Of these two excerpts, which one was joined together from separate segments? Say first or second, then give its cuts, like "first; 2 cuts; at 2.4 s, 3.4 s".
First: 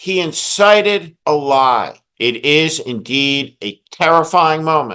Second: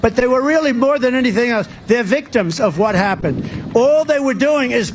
first; 2 cuts; at 1.1 s, 2.0 s